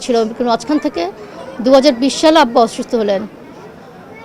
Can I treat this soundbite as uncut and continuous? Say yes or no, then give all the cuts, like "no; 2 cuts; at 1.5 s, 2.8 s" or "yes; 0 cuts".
yes; 0 cuts